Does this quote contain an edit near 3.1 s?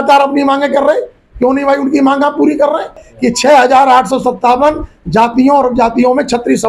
yes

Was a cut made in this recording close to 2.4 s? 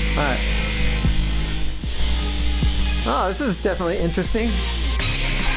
no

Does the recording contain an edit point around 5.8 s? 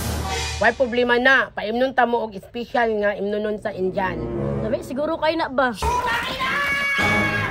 yes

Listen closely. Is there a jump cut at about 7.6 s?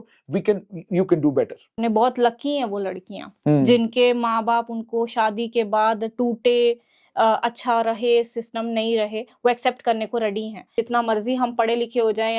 no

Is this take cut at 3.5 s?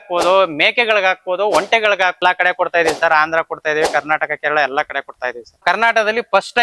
no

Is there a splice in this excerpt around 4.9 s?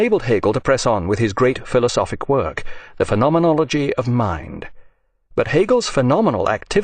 no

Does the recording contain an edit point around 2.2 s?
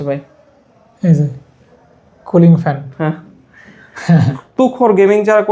no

